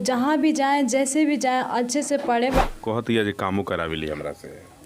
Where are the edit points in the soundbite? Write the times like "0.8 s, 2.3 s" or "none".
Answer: 2.7 s